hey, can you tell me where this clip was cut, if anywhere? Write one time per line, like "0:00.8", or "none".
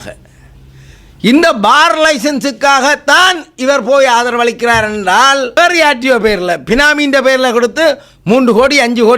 0:05.6

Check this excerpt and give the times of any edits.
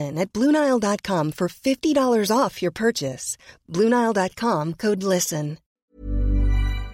0:05.8

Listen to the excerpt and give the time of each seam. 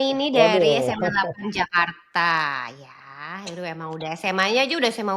none

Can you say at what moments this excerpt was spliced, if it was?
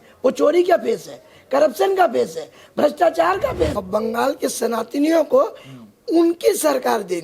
0:03.7

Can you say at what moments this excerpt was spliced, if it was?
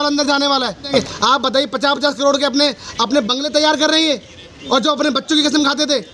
0:01.0

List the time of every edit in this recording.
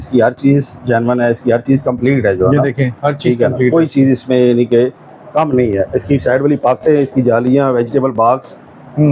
none

